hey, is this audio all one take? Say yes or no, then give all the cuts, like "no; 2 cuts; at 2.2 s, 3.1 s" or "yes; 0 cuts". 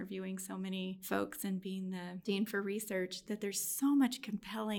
no; 2 cuts; at 1.0 s, 2.2 s